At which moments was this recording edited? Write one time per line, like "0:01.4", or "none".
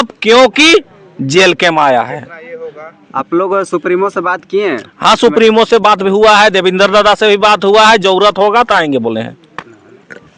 none